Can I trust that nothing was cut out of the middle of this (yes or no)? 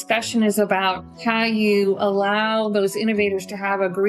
no